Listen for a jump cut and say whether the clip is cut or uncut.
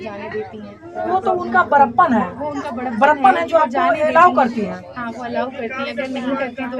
uncut